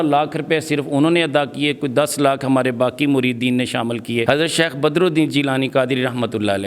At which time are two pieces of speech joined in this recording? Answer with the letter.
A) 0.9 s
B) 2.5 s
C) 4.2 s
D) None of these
C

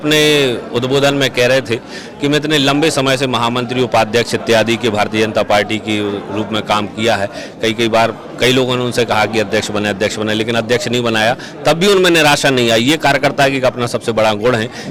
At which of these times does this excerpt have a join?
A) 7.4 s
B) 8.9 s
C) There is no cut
C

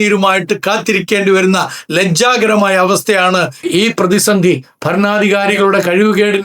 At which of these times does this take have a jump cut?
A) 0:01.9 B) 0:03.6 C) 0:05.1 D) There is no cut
B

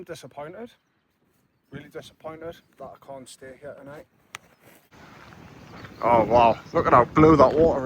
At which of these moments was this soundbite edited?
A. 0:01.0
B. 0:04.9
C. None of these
B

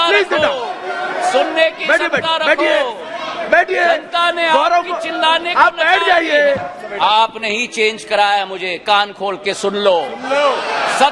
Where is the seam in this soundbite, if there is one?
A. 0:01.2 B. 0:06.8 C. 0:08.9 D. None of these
B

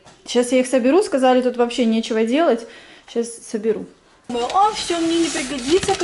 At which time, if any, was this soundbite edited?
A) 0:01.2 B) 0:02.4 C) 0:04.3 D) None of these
C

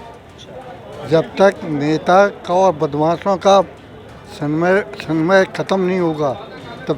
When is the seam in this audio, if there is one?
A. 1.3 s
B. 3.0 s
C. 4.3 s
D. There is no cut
D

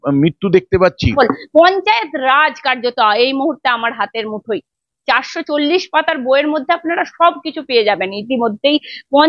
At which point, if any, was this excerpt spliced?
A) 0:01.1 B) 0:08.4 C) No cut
A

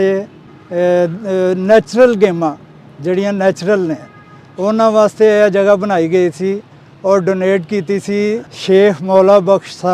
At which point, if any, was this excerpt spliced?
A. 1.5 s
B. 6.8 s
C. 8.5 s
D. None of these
C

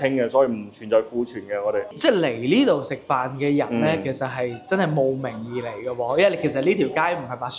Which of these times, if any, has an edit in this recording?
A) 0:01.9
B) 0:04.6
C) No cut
A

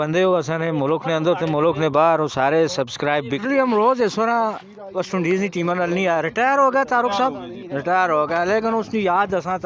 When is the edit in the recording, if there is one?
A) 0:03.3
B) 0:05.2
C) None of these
A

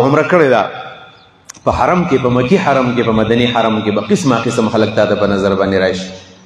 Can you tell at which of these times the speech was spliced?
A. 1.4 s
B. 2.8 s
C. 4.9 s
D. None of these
D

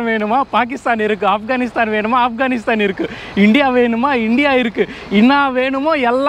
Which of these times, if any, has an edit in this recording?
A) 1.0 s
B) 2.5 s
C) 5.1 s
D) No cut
D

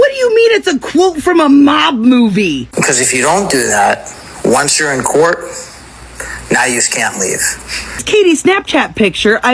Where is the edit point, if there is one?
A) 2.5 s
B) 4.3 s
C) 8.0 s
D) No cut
C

